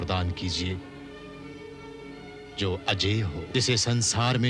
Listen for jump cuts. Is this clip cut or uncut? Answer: cut